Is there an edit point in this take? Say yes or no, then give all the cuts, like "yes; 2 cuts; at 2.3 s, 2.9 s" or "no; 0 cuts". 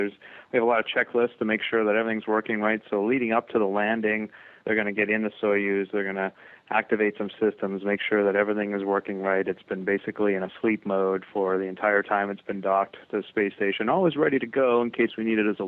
yes; 1 cut; at 11.9 s